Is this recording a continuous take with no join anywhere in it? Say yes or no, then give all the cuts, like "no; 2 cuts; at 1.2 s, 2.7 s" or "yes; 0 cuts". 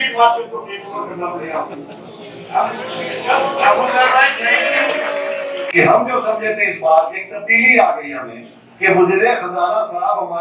yes; 0 cuts